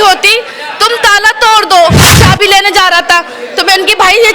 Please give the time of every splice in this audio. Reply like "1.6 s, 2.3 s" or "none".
2.1 s

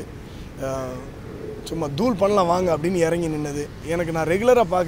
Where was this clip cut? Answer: 3.8 s

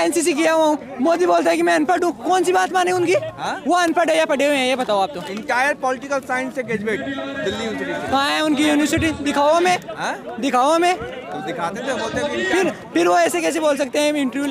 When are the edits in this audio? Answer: none

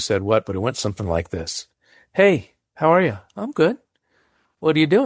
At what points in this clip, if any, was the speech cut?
none

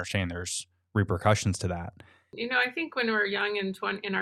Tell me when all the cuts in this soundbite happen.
2.4 s

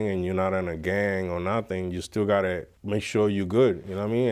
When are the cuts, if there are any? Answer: none

